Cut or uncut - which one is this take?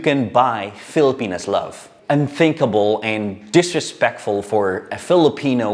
cut